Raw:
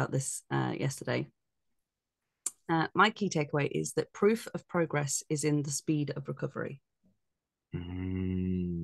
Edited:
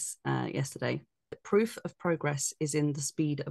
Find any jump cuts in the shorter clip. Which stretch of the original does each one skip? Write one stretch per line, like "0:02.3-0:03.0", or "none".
0:01.7-0:04.1